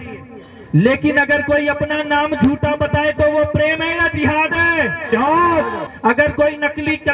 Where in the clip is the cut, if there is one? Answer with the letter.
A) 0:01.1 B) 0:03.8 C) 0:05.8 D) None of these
C